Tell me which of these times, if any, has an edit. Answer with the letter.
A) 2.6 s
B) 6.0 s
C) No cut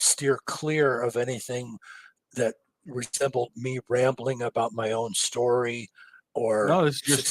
C